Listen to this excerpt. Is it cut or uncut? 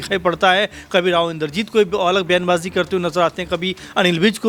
uncut